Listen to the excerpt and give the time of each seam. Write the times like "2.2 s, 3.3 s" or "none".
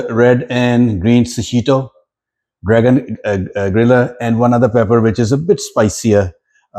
none